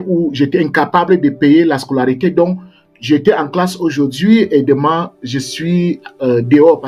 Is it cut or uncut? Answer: uncut